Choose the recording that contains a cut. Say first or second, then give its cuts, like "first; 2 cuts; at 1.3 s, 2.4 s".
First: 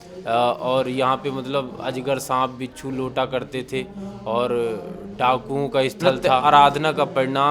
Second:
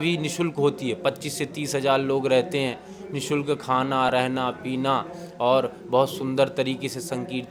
first; 1 cut; at 6.4 s